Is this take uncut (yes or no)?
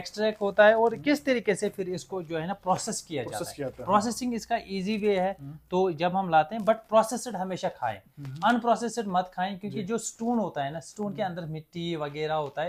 yes